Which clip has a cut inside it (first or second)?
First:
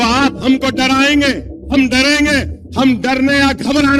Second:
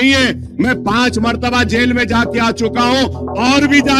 first